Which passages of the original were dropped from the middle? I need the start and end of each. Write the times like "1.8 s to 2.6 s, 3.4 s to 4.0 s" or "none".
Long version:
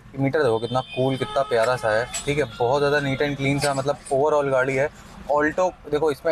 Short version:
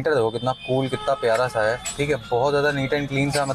none